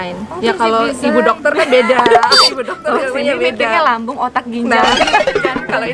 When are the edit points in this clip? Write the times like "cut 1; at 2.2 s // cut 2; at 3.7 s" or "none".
none